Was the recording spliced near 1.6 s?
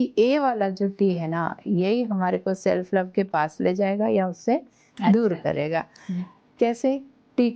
no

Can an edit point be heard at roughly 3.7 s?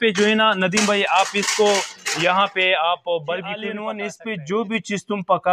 yes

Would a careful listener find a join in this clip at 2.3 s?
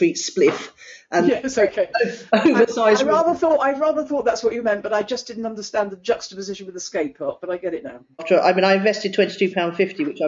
no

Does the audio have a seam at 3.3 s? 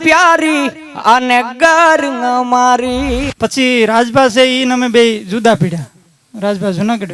yes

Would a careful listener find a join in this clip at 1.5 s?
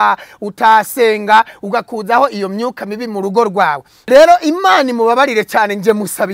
no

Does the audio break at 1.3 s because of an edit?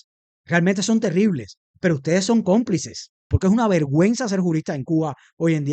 no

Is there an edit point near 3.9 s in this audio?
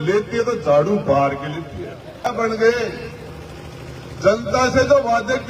no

